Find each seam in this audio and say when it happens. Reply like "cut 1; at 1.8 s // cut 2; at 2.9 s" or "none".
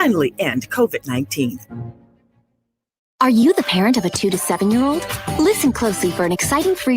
cut 1; at 3.0 s